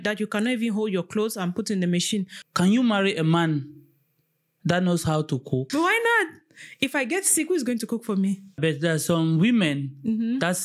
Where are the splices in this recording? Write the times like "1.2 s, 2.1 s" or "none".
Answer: 2.4 s, 5.7 s, 8.6 s